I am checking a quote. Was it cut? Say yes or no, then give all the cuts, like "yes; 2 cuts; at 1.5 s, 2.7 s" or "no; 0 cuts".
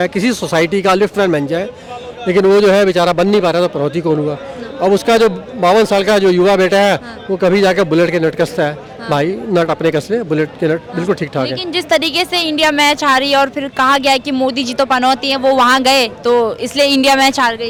no; 0 cuts